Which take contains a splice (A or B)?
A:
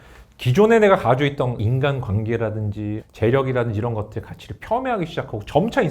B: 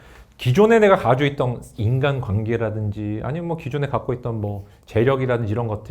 A